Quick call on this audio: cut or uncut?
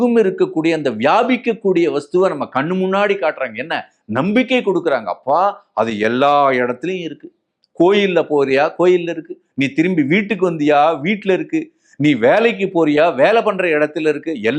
uncut